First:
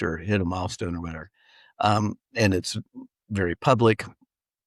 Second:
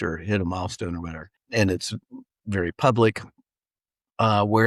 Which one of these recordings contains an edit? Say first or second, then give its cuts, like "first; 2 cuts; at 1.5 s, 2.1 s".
second; 1 cut; at 1.4 s